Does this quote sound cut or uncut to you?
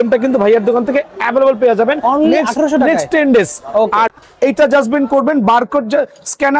cut